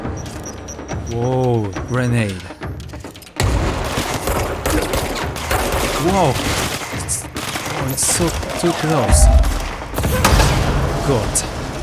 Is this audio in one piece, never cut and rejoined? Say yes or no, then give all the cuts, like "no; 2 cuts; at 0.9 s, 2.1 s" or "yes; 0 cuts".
yes; 0 cuts